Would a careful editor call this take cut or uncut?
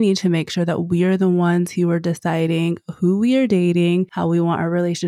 cut